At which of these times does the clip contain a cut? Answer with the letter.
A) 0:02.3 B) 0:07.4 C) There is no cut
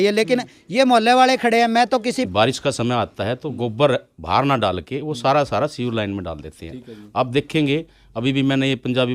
A